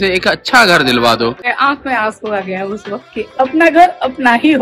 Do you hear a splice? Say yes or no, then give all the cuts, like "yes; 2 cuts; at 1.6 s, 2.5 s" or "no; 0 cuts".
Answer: yes; 1 cut; at 1.5 s